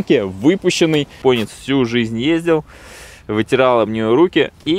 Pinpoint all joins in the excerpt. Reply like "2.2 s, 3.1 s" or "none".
1.2 s

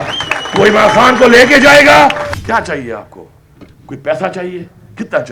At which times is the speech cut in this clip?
2.3 s

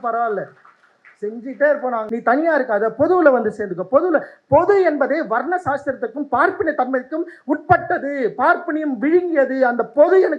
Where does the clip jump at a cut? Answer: 2.0 s

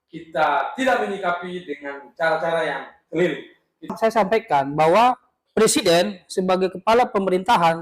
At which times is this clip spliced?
4.0 s

